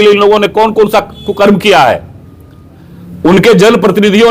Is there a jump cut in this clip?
no; 0 cuts

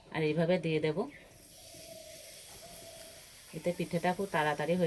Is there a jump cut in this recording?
no; 0 cuts

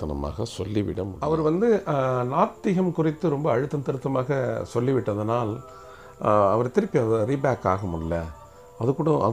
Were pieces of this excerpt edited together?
yes; 1 cut; at 1.1 s

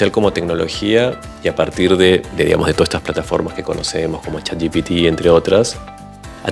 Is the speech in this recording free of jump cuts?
yes; 0 cuts

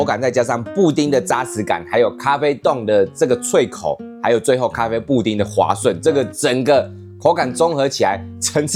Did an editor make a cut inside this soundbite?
no; 0 cuts

